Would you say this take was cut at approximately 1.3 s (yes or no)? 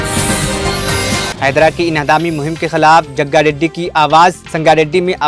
no